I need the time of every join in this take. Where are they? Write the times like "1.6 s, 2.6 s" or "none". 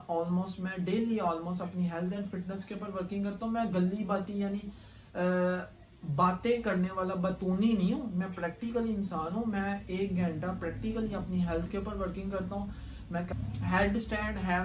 none